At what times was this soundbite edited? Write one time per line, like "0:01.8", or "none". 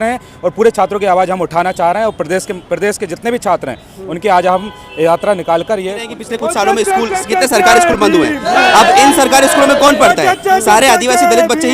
0:06.1